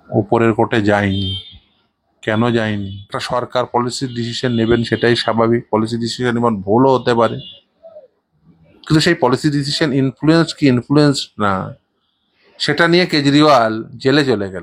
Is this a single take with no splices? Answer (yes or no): no